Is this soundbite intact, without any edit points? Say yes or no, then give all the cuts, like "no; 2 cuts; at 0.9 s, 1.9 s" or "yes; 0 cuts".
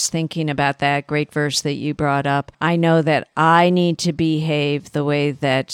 no; 1 cut; at 2.5 s